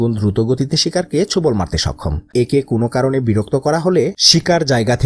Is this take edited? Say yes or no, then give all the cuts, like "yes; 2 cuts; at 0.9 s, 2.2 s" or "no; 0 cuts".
yes; 1 cut; at 2.3 s